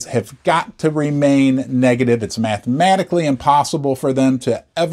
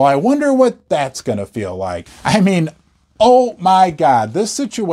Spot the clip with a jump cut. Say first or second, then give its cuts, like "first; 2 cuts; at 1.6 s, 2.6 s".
second; 1 cut; at 2.0 s